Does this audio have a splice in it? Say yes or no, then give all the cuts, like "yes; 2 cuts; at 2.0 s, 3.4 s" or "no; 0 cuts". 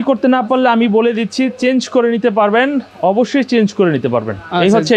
no; 0 cuts